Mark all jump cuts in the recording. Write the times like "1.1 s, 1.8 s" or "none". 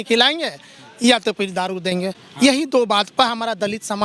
none